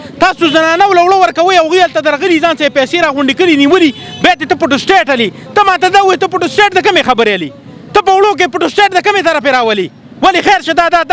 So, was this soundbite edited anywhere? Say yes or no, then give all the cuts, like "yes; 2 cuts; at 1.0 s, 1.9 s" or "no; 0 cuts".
no; 0 cuts